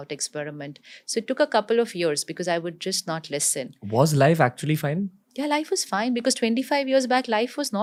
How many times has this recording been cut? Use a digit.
0